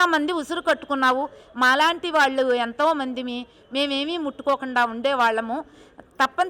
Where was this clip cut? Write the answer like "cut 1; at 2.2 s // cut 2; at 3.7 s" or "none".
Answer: none